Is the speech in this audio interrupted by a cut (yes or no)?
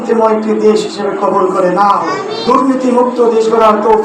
yes